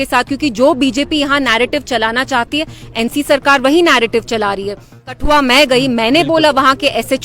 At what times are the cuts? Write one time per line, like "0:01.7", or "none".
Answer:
0:05.1